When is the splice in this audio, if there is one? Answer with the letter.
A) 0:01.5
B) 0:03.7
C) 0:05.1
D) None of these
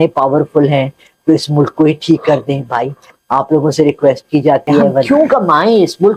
C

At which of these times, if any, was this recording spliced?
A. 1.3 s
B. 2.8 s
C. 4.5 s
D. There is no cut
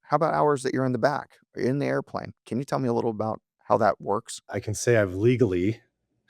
C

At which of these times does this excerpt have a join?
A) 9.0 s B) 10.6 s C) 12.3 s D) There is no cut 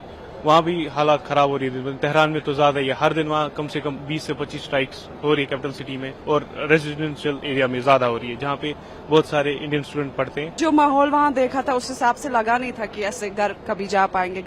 B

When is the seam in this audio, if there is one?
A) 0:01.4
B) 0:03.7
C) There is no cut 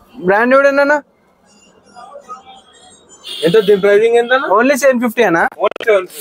C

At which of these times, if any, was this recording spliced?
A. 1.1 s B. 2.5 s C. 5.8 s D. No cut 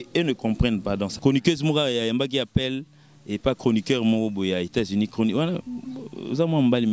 A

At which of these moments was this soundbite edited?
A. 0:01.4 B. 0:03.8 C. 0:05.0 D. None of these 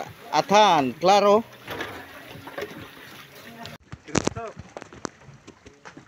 B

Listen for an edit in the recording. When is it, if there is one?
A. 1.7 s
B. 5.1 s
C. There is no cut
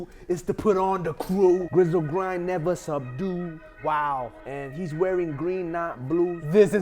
A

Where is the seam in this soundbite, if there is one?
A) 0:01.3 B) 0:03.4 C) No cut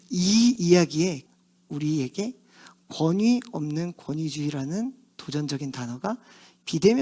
A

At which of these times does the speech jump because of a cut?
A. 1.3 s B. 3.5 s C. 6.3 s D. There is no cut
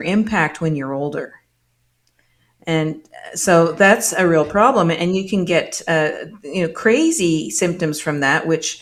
D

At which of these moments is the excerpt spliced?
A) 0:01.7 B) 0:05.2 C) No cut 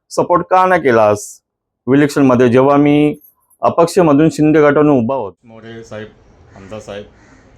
B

